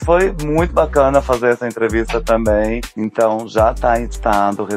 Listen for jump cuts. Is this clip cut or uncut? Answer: uncut